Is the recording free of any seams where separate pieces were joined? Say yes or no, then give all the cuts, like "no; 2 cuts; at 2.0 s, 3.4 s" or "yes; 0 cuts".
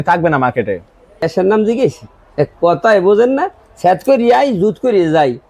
no; 1 cut; at 1.3 s